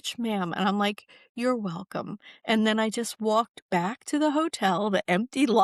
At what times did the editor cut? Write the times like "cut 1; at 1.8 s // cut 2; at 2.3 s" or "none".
none